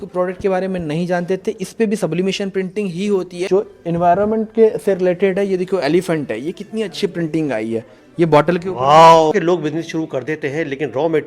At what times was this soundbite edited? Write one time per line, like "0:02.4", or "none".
0:03.4
0:09.3

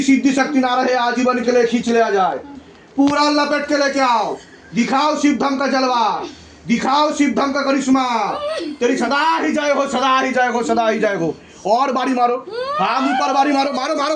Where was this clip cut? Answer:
none

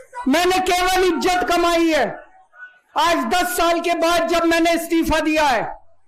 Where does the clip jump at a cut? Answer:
none

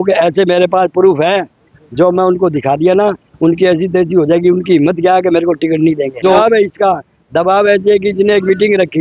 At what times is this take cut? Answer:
0:06.4

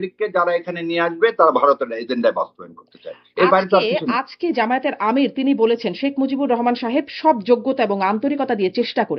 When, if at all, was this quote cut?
none

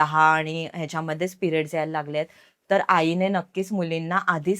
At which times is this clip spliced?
none

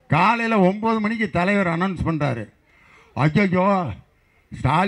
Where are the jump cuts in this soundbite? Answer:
none

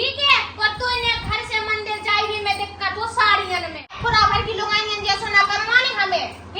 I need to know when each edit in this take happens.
0:04.0

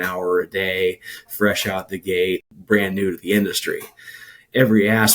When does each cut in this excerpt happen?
0:02.5

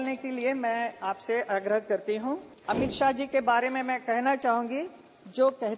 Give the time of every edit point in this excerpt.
0:02.5

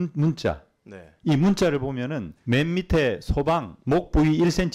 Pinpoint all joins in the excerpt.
0:02.3

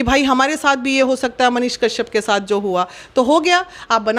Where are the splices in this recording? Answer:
none

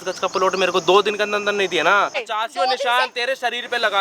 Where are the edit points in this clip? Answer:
0:02.3

